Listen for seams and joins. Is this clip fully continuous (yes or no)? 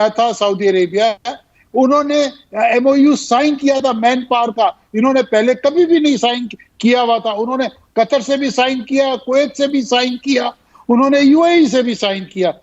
yes